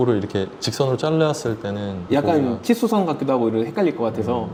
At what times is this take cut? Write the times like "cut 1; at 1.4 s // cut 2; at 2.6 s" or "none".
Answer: none